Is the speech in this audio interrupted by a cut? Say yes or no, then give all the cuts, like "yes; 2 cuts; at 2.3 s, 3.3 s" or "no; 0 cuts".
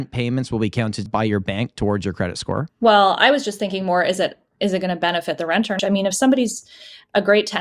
yes; 3 cuts; at 1.1 s, 2.7 s, 5.8 s